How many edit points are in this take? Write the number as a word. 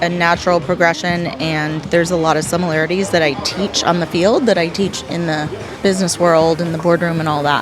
one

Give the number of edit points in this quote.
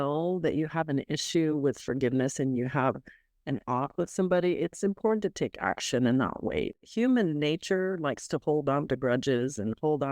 one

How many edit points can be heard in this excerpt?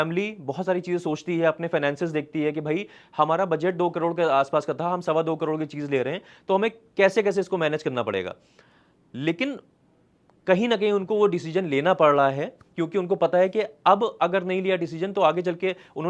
zero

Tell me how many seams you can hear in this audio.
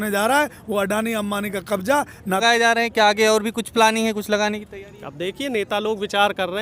one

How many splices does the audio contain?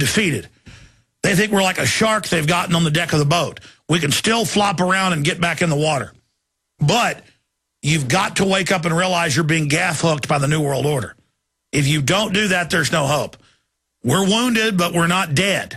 one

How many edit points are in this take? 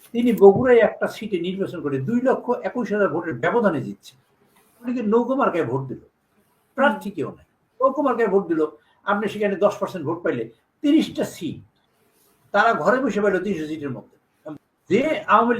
two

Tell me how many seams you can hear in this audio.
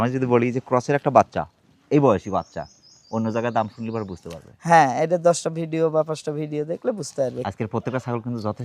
one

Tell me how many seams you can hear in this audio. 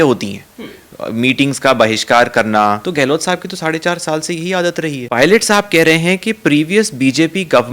two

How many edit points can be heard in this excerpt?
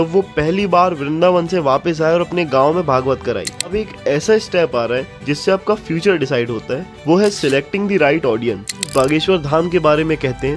two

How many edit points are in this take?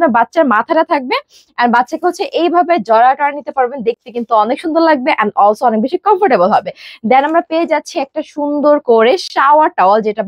zero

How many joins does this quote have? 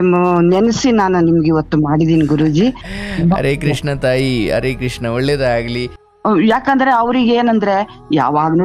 one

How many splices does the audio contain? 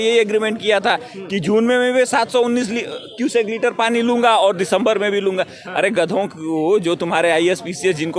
zero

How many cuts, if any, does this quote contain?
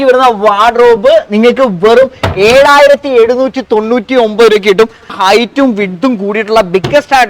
zero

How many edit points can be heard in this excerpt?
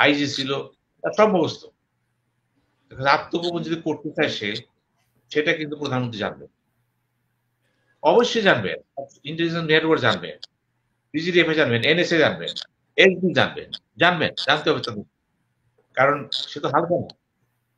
zero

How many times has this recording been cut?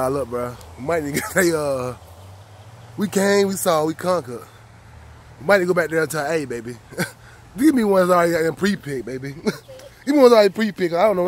zero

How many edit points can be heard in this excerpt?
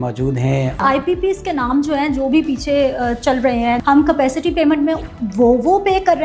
two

